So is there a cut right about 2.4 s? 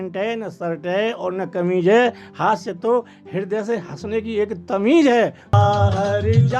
no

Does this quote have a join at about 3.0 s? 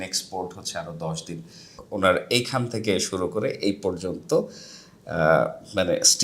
no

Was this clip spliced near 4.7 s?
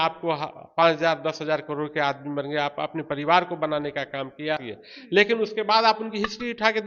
yes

